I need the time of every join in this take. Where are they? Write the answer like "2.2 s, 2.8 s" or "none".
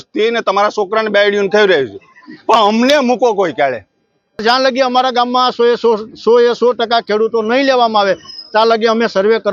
4.4 s